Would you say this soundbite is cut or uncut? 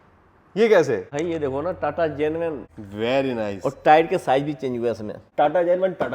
cut